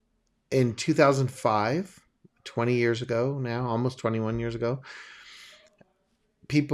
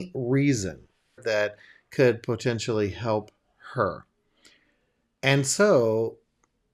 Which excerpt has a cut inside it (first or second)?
second